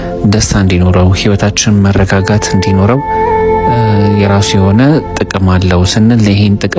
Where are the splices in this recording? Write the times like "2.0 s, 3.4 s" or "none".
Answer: none